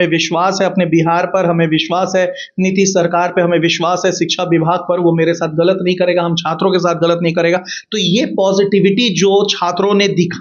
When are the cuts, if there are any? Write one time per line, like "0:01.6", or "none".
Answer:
none